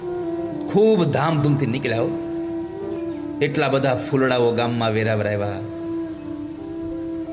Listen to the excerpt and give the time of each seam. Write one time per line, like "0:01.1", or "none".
0:02.9